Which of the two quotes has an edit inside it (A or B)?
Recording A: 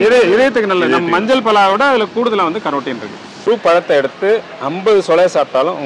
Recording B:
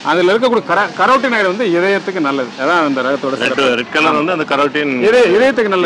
A